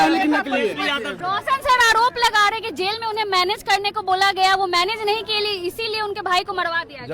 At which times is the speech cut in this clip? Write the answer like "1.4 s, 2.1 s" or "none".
1.1 s